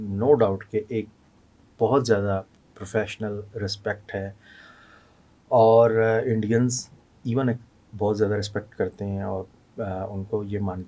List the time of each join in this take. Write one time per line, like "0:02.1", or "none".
none